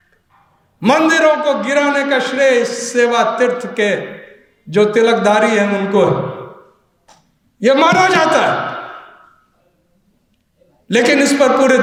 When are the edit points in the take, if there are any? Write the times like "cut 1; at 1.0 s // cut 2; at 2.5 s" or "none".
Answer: none

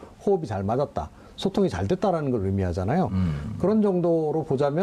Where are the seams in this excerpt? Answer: cut 1; at 2.1 s

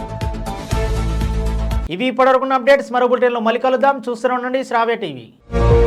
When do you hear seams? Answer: none

